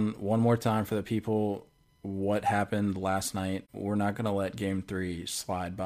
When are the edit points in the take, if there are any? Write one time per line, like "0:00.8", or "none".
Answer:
0:03.7